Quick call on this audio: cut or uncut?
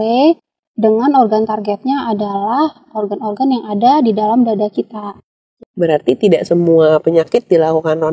cut